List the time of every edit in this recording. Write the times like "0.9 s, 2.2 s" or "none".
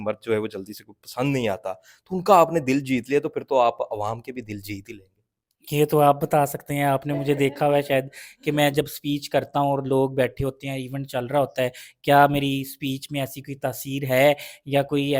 none

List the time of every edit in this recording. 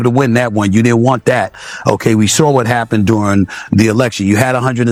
none

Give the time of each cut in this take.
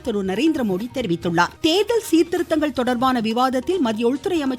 1.5 s

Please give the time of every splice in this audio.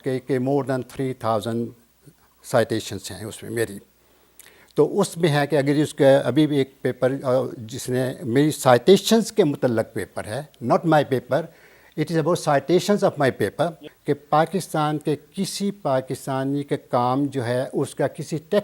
13.9 s

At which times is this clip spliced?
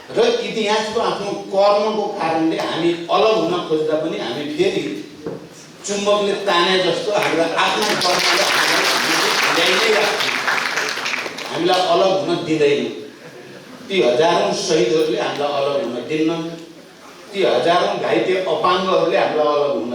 none

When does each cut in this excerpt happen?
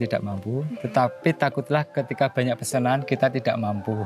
none

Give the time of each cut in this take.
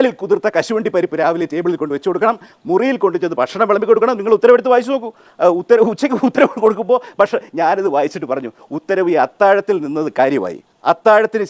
4.2 s

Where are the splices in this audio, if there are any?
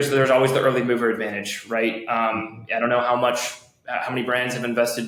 none

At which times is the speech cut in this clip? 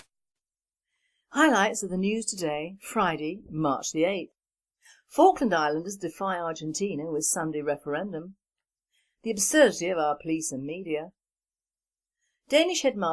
9.8 s

